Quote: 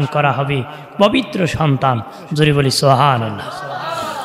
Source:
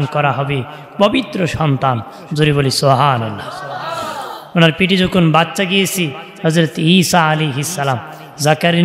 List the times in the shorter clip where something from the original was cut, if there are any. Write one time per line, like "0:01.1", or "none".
none